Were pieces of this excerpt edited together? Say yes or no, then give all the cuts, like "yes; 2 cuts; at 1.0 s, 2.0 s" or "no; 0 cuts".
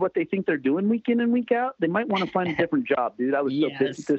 no; 0 cuts